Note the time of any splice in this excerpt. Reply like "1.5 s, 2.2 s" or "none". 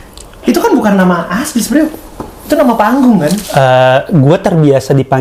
none

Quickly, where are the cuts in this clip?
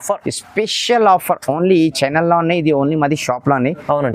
none

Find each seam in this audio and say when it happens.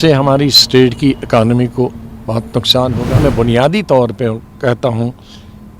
3.2 s

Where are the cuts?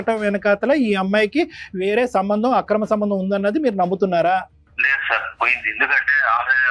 4.6 s

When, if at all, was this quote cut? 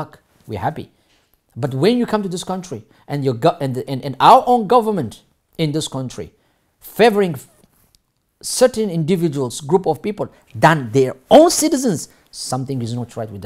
none

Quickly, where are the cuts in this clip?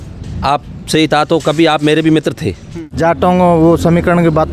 2.9 s

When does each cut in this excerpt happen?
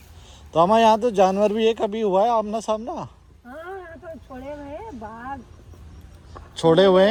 none

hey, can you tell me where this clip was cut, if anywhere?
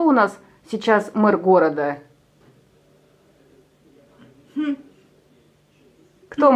none

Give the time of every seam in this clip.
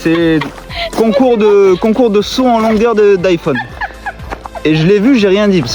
none

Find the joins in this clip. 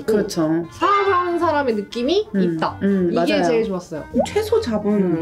4.1 s

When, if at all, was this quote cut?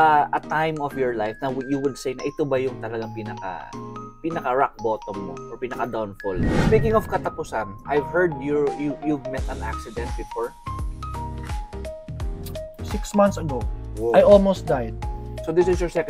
6.6 s

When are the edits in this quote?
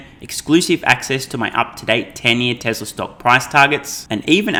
none

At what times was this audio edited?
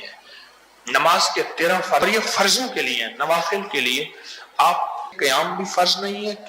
2.0 s, 5.1 s

